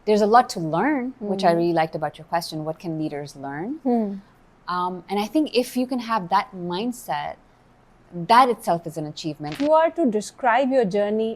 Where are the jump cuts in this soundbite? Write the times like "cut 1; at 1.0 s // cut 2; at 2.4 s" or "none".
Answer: cut 1; at 9.5 s